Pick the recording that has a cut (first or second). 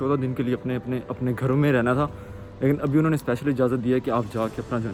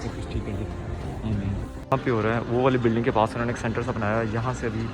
second